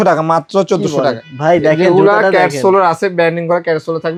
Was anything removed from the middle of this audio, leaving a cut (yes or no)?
no